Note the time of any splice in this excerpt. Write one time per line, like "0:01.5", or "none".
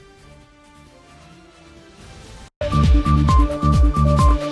0:02.0